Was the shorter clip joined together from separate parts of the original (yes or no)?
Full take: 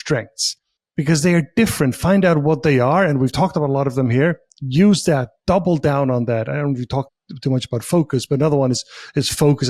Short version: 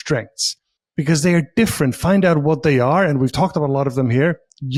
no